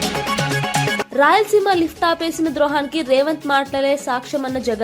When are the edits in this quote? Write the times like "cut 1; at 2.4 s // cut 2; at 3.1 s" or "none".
cut 1; at 1.1 s